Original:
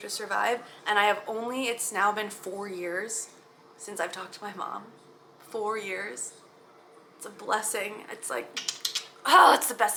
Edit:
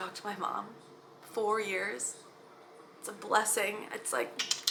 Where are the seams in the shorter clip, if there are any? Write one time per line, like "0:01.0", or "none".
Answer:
none